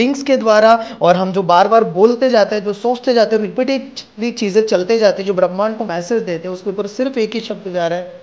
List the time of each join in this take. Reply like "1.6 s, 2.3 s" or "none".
none